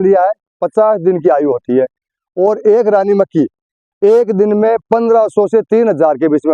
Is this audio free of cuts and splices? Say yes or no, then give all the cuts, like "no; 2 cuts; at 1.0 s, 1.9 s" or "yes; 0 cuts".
yes; 0 cuts